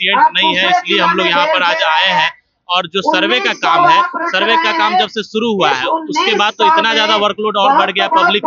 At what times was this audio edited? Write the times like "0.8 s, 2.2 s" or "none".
none